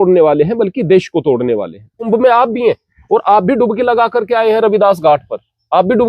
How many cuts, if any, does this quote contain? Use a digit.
1